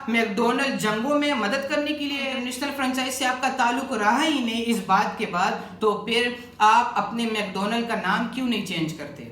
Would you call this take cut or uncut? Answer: cut